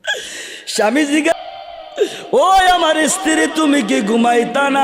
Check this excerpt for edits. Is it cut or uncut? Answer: cut